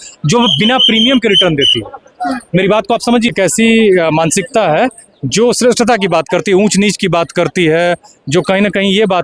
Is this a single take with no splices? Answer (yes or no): no